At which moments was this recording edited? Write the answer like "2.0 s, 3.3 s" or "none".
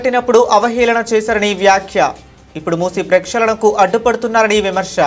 none